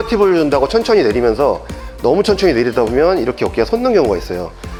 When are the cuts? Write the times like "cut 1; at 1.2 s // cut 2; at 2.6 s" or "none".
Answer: none